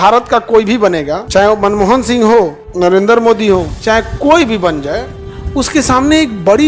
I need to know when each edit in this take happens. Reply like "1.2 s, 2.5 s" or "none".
1.2 s, 2.6 s, 3.7 s